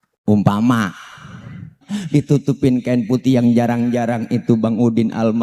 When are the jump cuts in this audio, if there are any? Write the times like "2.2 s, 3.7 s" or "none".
1.9 s